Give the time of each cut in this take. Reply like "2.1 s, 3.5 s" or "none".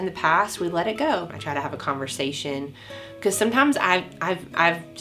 1.3 s